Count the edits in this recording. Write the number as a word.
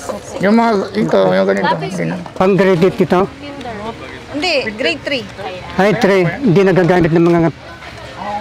one